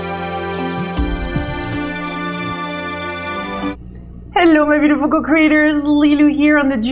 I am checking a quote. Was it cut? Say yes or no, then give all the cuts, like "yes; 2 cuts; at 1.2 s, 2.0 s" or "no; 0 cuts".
no; 0 cuts